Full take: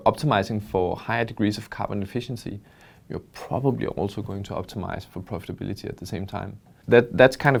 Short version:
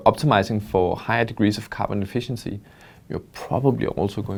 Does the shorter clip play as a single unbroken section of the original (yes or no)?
yes